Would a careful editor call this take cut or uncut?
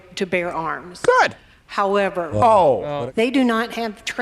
cut